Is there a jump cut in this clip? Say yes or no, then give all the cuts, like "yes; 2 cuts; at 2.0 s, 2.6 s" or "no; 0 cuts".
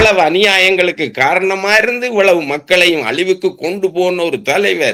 no; 0 cuts